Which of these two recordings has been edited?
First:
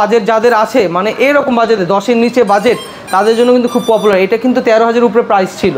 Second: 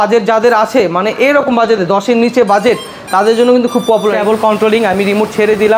second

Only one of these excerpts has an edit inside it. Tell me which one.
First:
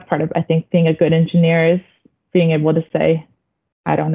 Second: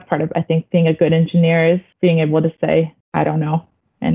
second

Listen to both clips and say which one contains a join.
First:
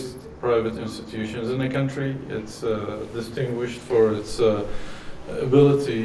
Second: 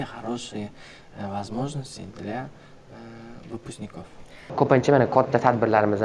second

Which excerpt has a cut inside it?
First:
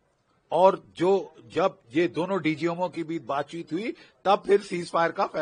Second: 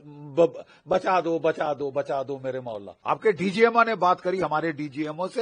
second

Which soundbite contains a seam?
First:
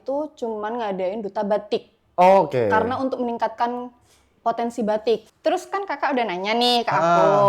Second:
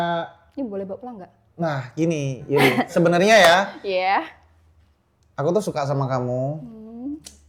first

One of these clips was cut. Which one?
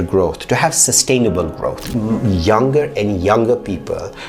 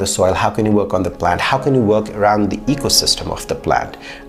first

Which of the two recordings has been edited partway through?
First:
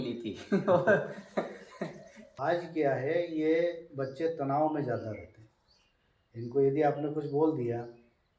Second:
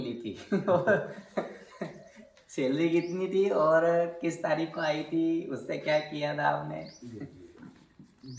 first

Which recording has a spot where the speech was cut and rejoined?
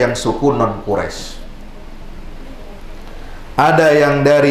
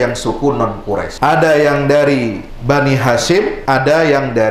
second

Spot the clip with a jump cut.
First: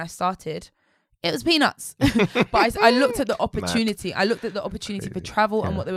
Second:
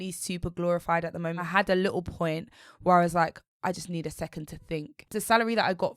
second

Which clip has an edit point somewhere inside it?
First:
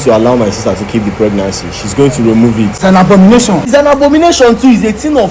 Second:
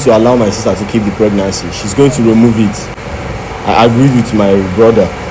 first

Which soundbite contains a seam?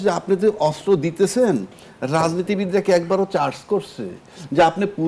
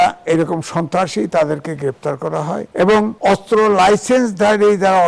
second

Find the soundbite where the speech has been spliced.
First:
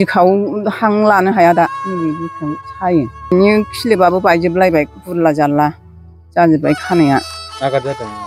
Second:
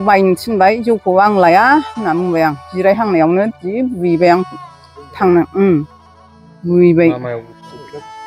first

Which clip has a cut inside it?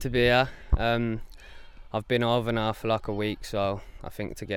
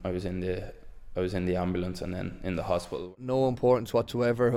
second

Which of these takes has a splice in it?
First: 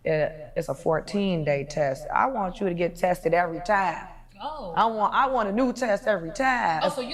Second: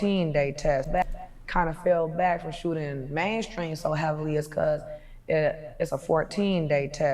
second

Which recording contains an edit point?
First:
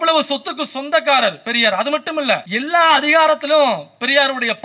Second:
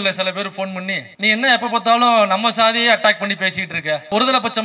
first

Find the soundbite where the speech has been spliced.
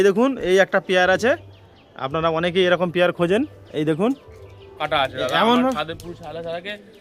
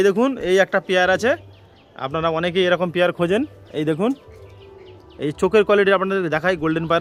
first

